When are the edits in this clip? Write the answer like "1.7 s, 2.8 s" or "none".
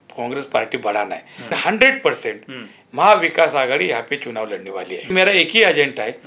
1.6 s, 5.1 s